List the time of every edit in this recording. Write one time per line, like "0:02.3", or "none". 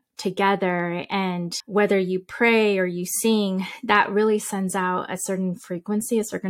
0:01.5